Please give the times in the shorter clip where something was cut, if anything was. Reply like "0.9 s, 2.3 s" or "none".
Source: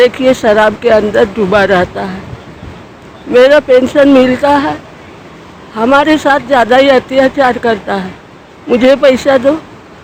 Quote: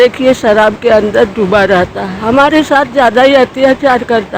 2.1 s